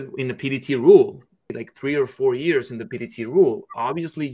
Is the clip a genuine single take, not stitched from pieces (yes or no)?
no